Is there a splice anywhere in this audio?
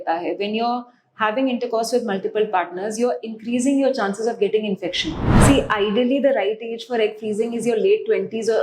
yes; 1 cut; at 5.3 s

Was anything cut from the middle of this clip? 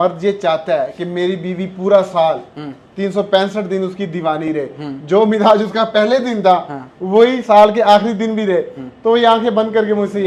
no; 0 cuts

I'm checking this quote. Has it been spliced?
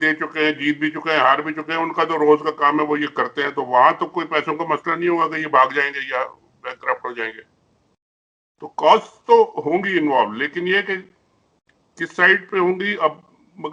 no; 0 cuts

